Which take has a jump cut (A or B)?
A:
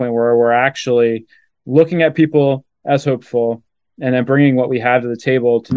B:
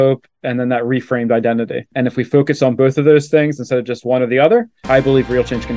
B